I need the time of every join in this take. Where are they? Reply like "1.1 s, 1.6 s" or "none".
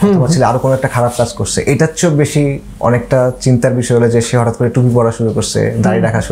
none

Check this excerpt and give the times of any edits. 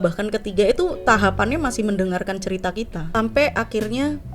3.1 s

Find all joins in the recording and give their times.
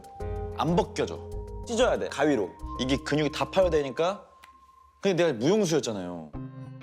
2.7 s

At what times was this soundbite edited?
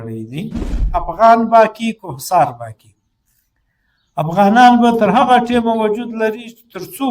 0.9 s

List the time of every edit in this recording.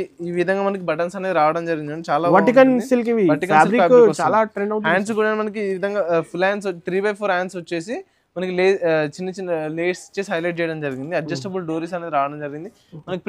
none

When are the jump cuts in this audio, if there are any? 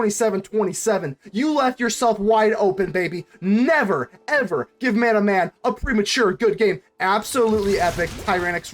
6.8 s

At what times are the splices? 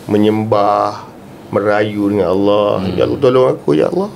none

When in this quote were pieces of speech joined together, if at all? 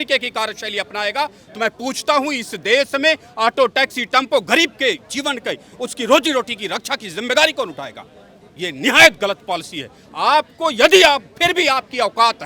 none

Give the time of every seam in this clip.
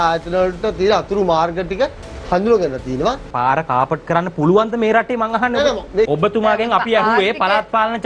3.3 s, 6.1 s

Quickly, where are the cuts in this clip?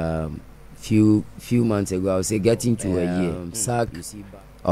3.5 s

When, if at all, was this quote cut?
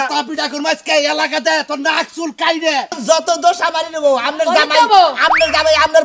3.0 s

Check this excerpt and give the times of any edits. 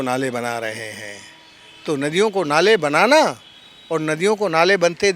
none

